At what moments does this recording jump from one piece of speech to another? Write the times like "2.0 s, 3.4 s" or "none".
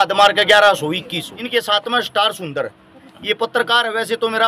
1.3 s